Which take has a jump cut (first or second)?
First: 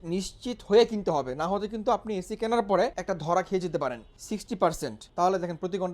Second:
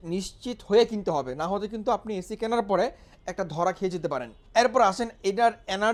first